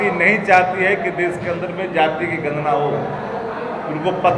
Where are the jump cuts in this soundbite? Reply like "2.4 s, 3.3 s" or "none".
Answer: none